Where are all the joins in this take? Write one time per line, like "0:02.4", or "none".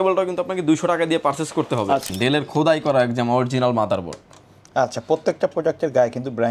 0:02.1